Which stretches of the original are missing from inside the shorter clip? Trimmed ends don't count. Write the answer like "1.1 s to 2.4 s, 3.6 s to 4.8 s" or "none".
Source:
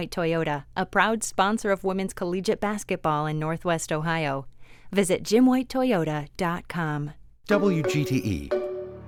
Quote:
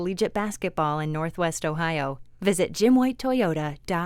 4.5 s to 4.8 s